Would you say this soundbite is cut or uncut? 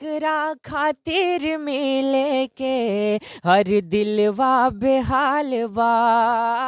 uncut